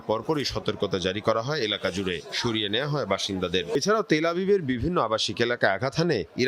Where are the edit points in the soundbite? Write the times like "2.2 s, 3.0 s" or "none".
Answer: 3.8 s